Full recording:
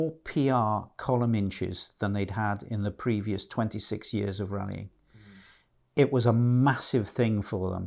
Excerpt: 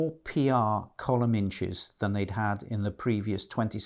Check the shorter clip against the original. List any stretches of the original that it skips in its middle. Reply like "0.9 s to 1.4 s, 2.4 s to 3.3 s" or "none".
none